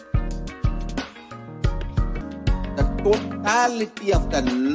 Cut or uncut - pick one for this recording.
cut